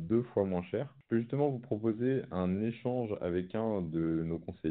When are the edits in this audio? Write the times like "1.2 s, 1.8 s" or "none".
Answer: 1.0 s